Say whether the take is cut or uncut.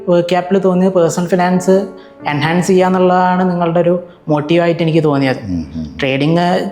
uncut